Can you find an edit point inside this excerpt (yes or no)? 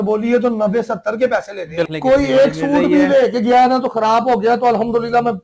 yes